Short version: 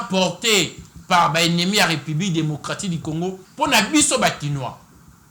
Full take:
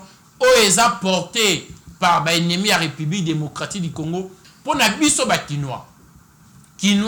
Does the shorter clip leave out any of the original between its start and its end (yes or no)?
yes